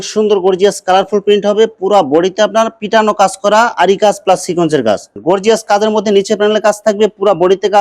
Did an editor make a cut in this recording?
yes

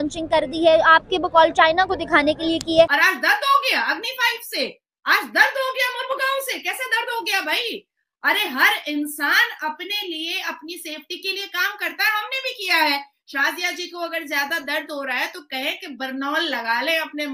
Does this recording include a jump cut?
yes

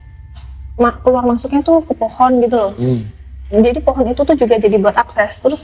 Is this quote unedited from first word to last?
yes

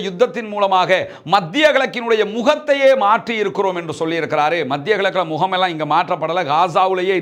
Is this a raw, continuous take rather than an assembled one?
yes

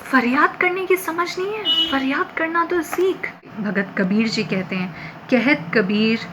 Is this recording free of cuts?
no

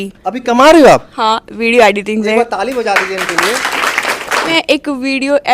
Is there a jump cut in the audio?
yes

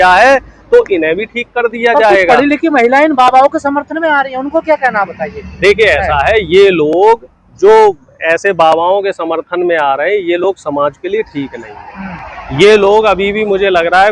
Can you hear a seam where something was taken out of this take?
no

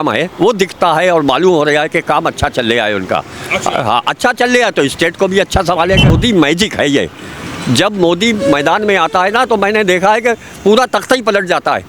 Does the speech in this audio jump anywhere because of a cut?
yes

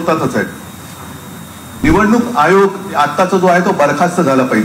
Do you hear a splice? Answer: yes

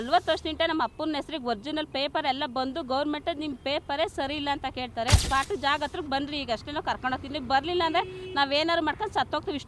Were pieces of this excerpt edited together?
yes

